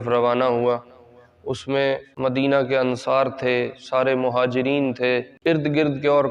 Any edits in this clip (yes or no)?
yes